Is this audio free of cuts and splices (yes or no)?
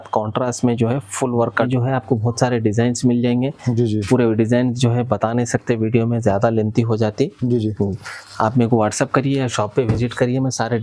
no